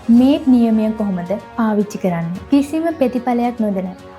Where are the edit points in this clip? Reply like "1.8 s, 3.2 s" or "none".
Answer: 2.3 s